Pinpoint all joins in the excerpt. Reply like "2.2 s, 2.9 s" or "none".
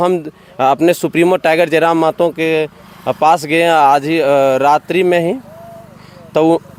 none